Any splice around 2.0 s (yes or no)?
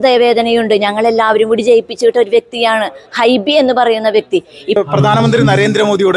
no